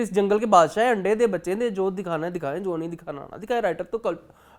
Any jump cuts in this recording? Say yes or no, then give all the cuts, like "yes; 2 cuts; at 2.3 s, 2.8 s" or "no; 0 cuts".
no; 0 cuts